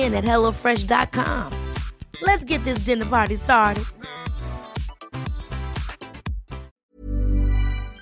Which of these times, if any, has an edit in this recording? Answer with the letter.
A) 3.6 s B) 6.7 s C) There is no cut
B